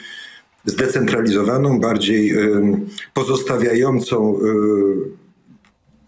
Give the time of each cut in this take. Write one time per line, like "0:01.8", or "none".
none

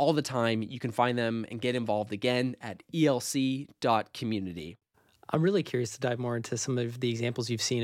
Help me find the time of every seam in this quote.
none

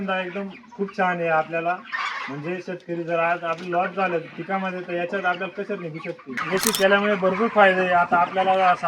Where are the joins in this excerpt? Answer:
0:06.4

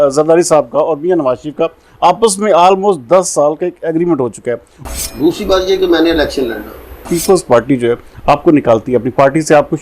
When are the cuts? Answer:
0:04.7
0:07.1

